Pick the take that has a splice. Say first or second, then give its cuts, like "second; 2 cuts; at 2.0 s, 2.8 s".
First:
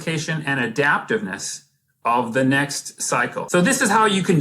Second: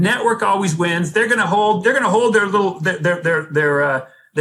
first; 1 cut; at 3.4 s